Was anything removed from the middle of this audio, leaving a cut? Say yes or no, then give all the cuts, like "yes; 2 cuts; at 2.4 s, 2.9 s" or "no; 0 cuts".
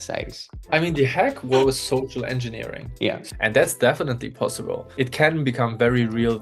yes; 2 cuts; at 3.2 s, 4.9 s